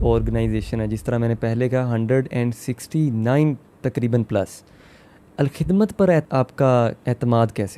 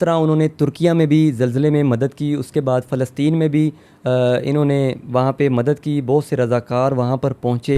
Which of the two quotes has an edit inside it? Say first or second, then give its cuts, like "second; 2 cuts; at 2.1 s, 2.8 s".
first; 1 cut; at 6.5 s